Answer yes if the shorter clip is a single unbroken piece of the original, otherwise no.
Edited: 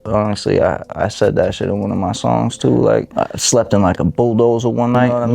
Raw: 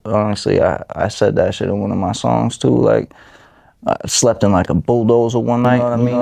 no